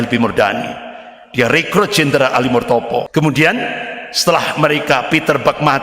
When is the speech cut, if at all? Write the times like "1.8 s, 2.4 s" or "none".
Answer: 3.1 s